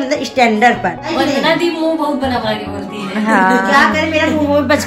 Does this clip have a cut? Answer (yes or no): yes